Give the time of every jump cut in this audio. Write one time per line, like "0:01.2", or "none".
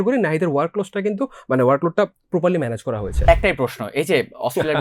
0:03.3